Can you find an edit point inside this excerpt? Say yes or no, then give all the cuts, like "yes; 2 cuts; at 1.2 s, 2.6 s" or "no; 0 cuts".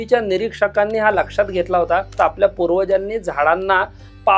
yes; 1 cut; at 2.2 s